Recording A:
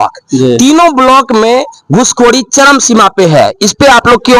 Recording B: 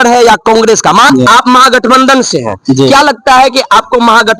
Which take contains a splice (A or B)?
B